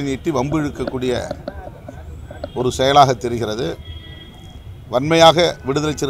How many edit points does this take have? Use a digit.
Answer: 0